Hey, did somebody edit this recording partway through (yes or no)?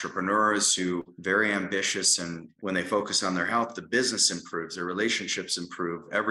yes